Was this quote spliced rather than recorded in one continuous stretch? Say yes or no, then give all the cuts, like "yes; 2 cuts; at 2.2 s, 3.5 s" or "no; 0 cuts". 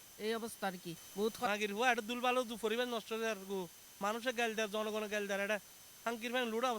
yes; 1 cut; at 1.5 s